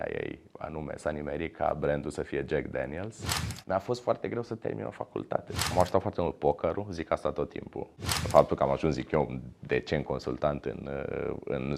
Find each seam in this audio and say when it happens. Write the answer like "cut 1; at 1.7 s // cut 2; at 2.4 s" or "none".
cut 1; at 3.5 s // cut 2; at 5.7 s // cut 3; at 8.2 s

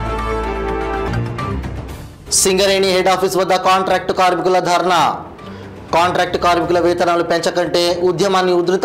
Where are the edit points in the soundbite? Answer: cut 1; at 1.1 s

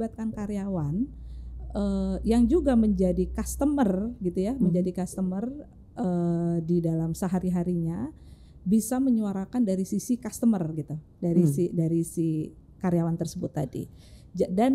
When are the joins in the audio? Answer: none

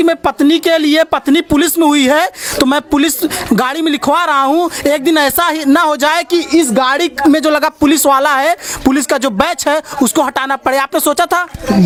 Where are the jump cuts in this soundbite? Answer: none

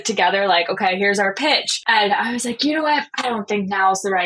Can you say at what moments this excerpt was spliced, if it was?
cut 1; at 1.7 s // cut 2; at 3.1 s

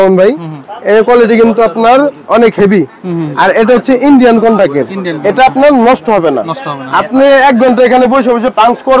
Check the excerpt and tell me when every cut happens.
none

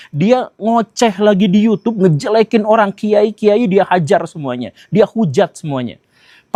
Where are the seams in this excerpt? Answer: none

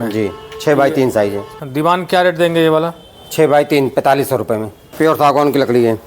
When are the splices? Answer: cut 1; at 1.5 s // cut 2; at 4.8 s

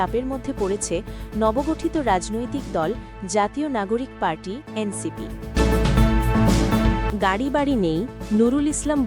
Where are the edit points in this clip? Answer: cut 1; at 5.5 s // cut 2; at 7.1 s

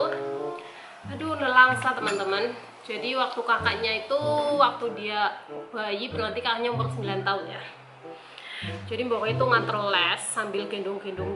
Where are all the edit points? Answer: none

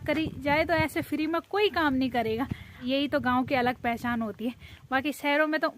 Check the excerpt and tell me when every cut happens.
cut 1; at 2.8 s

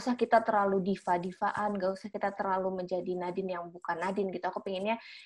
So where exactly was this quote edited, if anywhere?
none

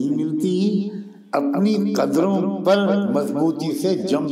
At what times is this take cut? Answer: none

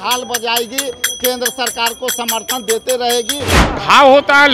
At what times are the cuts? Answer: cut 1; at 3.5 s

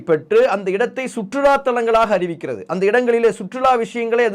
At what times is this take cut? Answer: none

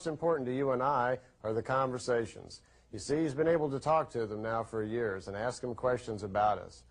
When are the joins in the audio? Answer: cut 1; at 4.6 s

